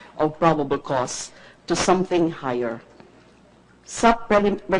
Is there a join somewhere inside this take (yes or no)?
no